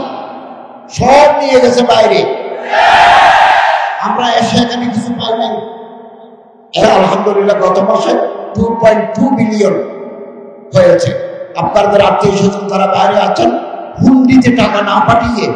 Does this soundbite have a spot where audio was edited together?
yes; 1 cut; at 6.8 s

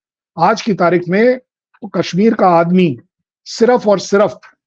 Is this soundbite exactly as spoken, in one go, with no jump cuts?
yes; 0 cuts

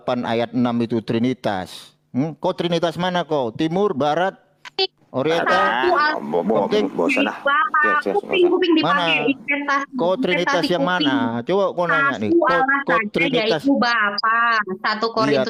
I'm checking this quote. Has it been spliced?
no; 0 cuts

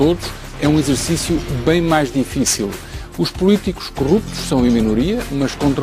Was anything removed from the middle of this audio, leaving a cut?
yes; 1 cut; at 2.3 s

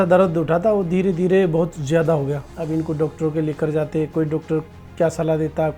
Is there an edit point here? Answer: yes; 1 cut; at 2.5 s

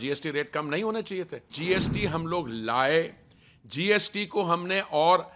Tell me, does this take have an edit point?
yes; 1 cut; at 1.5 s

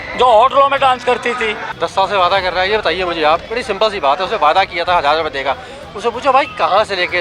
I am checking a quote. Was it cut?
yes; 1 cut; at 1.6 s

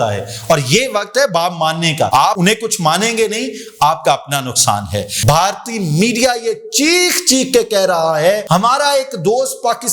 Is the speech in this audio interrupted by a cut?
yes; 3 cuts; at 2.2 s, 5.1 s, 8.4 s

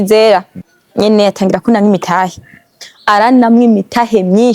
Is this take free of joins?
no; 1 cut; at 1.0 s

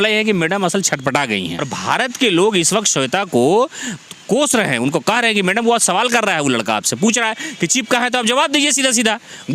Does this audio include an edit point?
yes; 1 cut; at 1.7 s

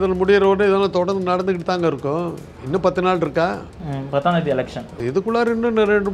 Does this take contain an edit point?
yes; 1 cut; at 4.9 s

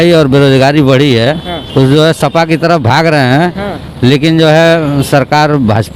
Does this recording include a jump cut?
yes; 1 cut; at 1.5 s

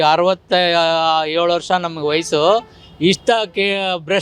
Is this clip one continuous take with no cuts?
yes; 0 cuts

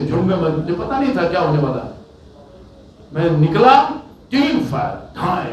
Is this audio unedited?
yes; 0 cuts

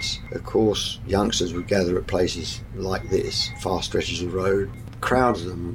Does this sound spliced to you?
yes; 1 cut; at 4.8 s

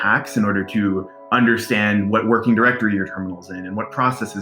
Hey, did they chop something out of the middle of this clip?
no; 0 cuts

